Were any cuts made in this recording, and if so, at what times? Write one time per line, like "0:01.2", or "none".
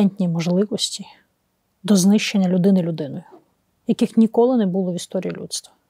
none